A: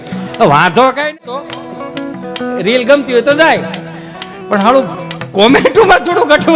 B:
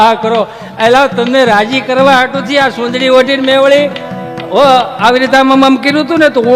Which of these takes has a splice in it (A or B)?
A